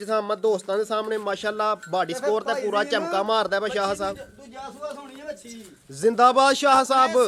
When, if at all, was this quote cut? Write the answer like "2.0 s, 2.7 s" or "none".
none